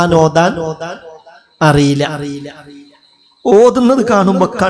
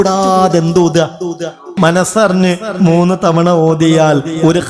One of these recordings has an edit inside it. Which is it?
second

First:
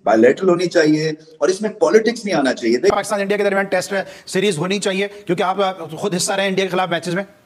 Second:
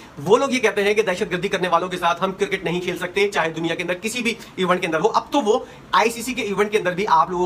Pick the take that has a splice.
first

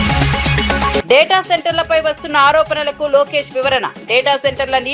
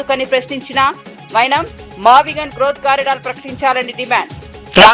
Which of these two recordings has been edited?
first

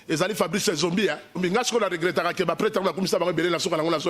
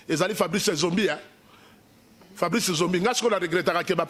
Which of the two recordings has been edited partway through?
first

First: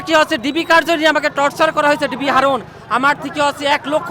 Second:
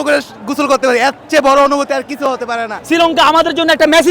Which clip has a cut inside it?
second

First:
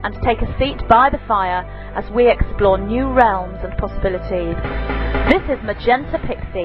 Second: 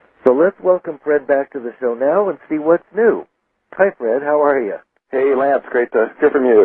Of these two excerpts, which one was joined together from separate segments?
second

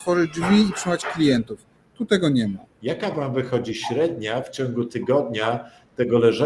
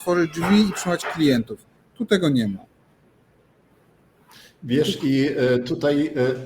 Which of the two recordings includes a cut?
first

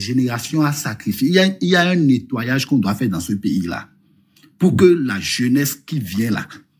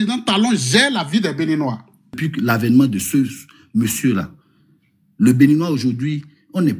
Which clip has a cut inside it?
second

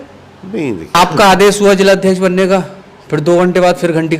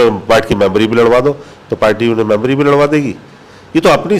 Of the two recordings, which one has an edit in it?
first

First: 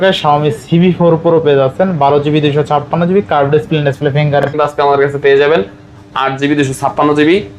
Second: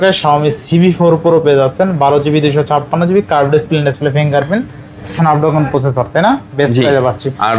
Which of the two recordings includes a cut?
first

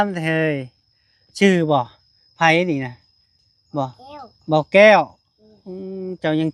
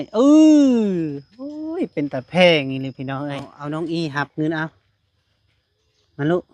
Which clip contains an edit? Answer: second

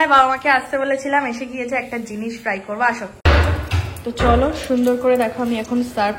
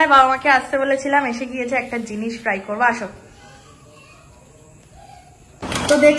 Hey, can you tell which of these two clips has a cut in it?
first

